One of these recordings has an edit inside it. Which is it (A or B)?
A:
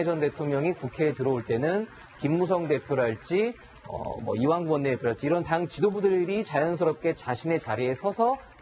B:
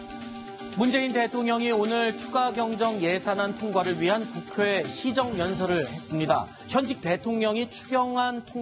A